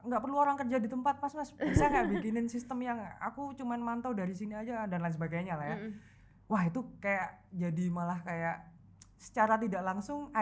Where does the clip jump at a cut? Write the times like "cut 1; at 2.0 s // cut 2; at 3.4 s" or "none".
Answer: none